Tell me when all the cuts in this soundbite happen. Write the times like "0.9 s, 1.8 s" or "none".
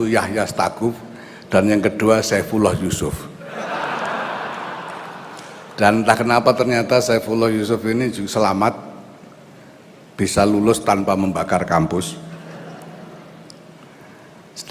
5.6 s